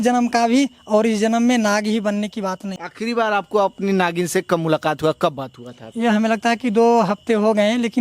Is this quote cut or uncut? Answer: cut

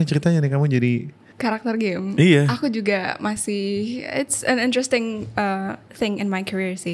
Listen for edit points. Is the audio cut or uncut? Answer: cut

